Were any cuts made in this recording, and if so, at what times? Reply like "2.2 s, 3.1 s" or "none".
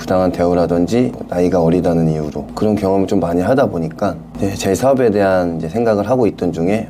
none